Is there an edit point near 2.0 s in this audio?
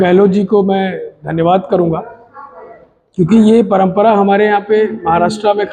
no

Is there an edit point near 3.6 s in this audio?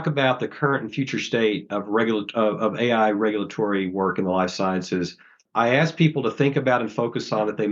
no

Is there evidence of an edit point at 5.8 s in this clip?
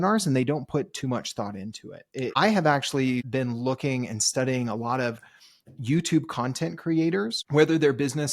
no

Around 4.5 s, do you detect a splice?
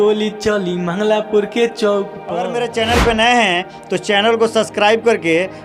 no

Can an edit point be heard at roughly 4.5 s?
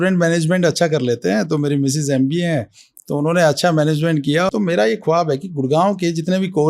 yes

